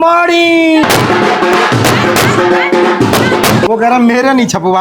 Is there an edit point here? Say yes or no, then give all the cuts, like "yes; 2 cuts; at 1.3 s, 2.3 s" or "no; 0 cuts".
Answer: yes; 2 cuts; at 0.8 s, 3.7 s